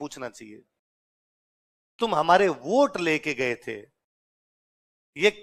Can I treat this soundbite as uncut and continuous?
yes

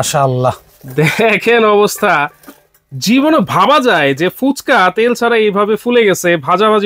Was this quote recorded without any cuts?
yes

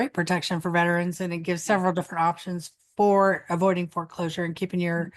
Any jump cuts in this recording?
no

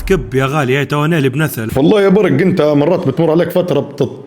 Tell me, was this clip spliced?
yes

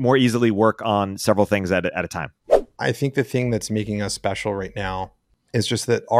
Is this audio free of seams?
no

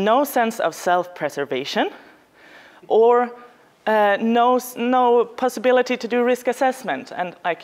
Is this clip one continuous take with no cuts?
yes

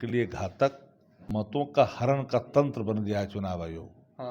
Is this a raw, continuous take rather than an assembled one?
no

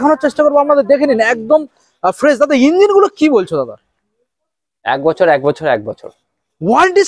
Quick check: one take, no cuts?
yes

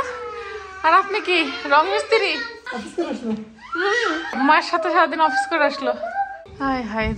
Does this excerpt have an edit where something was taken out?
yes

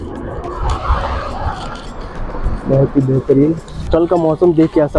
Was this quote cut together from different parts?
yes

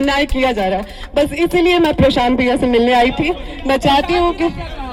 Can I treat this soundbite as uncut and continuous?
yes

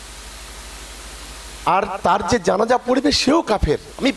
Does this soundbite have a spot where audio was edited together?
no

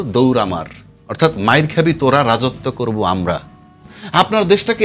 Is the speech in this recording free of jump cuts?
no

